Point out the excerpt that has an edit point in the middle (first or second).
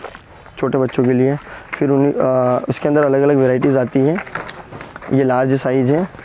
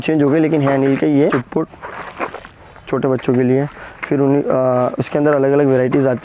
second